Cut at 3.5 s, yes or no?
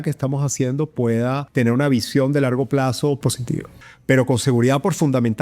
yes